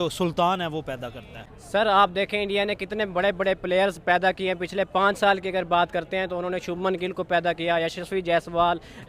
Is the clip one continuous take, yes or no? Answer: no